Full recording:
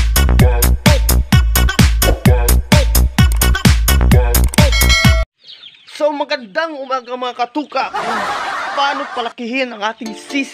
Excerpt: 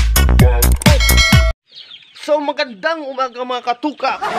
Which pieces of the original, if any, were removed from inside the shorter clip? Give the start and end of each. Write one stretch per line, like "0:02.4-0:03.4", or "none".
0:01.1-0:04.8